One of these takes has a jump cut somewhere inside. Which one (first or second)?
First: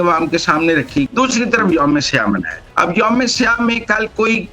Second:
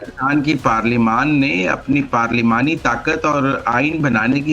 first